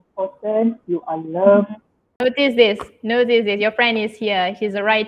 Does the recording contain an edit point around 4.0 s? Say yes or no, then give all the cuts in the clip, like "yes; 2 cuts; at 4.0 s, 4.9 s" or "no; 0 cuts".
no; 1 cut; at 2.2 s